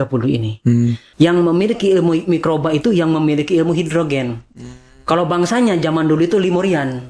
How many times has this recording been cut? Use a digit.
1